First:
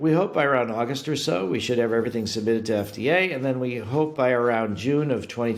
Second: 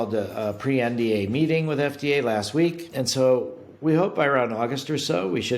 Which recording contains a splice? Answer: second; 1 cut; at 2.8 s

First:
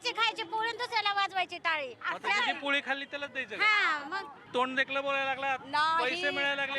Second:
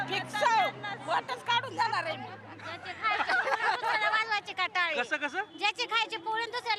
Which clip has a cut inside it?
first; 1 cut; at 4.4 s

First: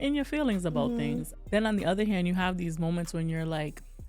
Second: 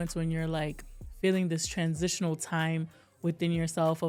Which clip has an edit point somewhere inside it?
first; 1 cut; at 1.3 s

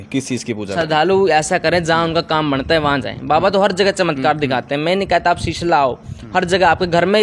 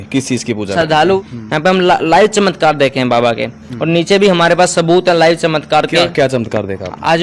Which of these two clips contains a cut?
second; 1 cut; at 1.2 s

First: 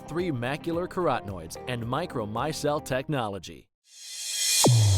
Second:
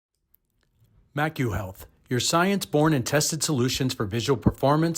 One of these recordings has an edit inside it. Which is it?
first; 1 cut; at 3.9 s

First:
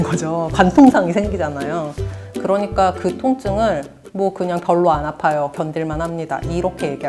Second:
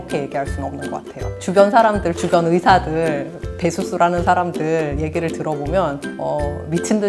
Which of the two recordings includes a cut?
second; 1 cut; at 1.4 s

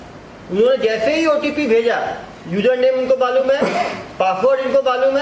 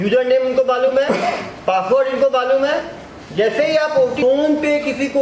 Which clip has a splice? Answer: second; 1 cut; at 4.2 s

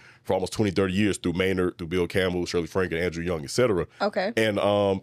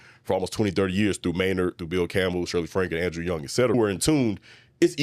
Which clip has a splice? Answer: second; 1 cut; at 3.7 s

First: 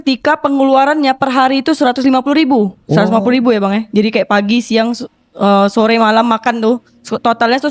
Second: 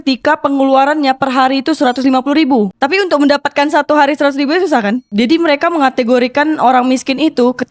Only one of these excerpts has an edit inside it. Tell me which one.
second; 2 cuts; at 2.8 s, 5.1 s

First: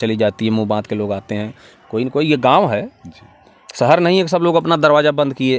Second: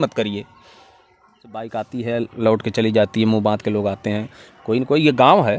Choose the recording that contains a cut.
second; 1 cut; at 1.7 s

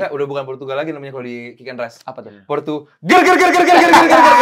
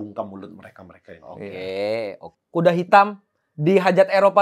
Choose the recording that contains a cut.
second; 1 cut; at 2.2 s

